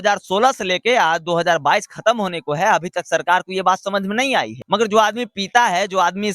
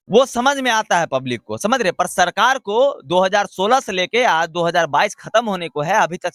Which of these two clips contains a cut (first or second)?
first